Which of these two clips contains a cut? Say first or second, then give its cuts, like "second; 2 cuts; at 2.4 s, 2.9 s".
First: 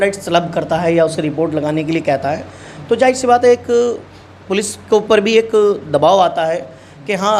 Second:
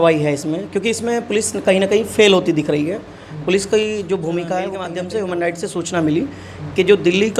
second; 1 cut; at 4.8 s